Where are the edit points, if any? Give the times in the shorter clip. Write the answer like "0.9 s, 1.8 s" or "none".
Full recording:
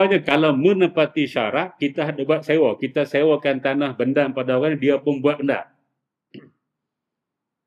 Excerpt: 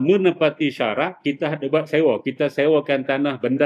none